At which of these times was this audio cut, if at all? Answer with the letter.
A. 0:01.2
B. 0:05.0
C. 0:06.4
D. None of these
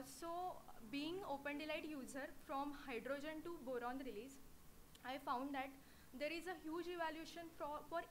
B